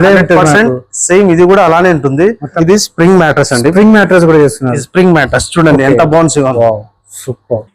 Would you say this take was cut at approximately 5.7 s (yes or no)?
no